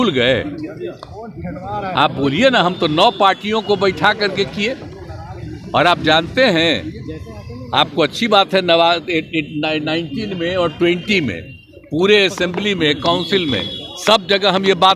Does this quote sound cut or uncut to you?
uncut